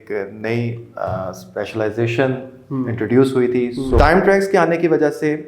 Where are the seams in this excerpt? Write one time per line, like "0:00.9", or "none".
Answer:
0:04.0